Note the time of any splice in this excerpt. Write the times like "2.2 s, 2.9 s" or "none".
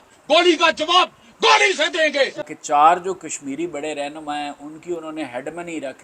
2.5 s